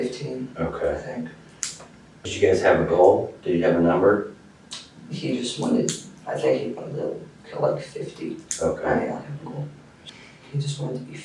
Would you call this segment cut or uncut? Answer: cut